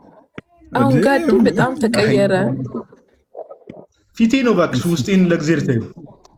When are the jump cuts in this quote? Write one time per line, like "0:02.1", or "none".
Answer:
none